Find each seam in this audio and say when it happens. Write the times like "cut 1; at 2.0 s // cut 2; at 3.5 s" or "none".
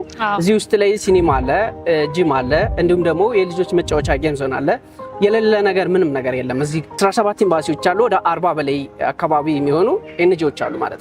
cut 1; at 7.0 s